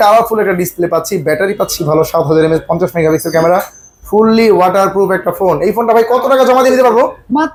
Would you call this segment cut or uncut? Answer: uncut